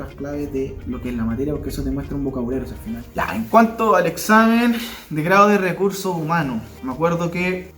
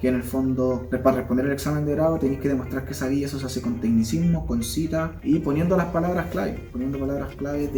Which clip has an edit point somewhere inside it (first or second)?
first